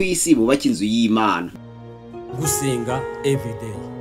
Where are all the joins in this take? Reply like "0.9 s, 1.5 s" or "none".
1.7 s